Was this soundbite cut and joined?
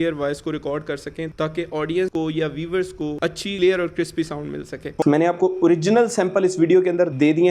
yes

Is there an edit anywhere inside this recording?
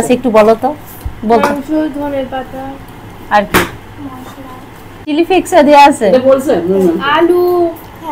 yes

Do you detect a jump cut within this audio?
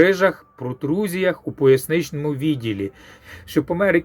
yes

